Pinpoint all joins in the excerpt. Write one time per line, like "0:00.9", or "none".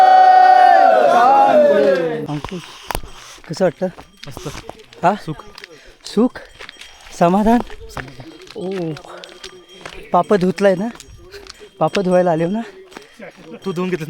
0:02.2